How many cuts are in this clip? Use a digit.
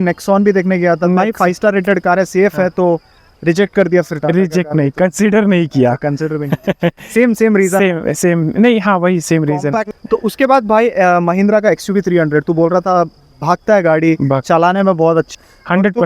2